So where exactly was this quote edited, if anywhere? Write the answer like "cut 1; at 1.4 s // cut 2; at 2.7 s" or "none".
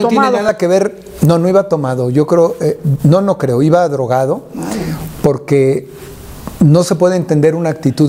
none